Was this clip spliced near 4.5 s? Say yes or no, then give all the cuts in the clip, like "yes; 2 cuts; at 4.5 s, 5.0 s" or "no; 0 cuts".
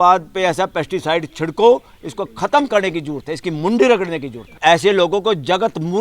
yes; 1 cut; at 4.5 s